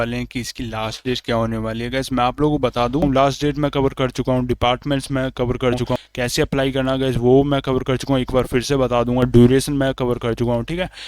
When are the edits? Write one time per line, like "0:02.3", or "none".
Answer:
0:03.0
0:06.0